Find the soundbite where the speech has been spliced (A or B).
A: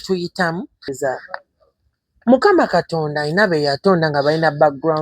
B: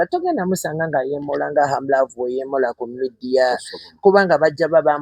A